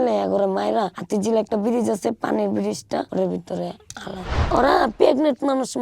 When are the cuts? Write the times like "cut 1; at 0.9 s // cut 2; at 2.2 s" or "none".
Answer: cut 1; at 4.4 s